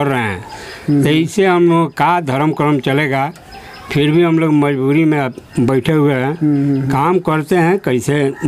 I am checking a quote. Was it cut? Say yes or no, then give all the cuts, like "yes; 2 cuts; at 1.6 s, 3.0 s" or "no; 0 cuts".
no; 0 cuts